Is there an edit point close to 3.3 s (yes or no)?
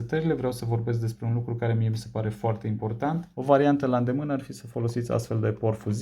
yes